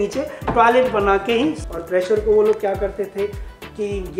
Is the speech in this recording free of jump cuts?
no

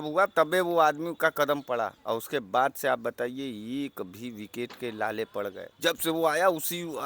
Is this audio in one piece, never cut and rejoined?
no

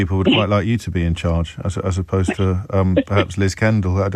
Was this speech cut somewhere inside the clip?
no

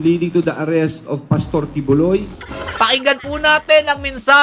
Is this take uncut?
no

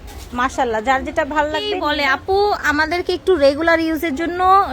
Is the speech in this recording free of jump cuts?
no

